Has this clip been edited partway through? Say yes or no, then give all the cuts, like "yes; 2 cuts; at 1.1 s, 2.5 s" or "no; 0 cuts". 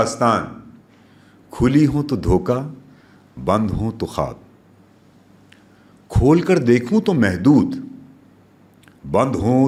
no; 0 cuts